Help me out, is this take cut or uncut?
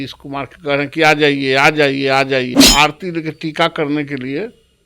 cut